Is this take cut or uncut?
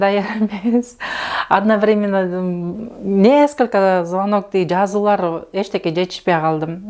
uncut